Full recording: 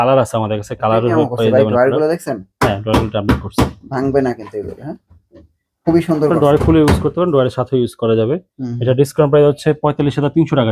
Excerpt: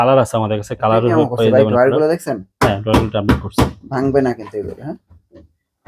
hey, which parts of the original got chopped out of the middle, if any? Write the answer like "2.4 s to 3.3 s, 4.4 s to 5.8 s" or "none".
none